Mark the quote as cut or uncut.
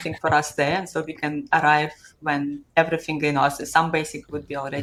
uncut